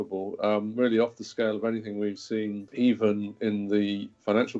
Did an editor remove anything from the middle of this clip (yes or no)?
yes